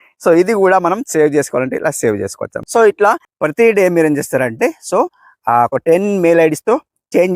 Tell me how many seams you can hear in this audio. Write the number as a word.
one